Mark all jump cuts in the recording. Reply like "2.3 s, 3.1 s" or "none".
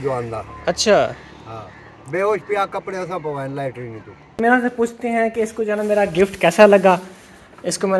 4.3 s